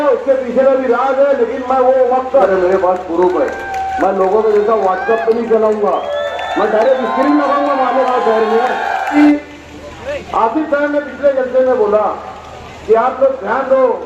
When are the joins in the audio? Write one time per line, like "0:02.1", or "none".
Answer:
0:02.4
0:09.1